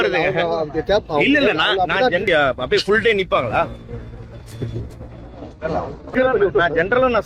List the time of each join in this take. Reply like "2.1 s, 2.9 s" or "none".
2.2 s, 6.1 s